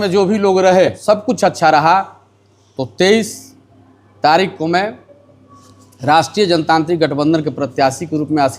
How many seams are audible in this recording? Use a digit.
1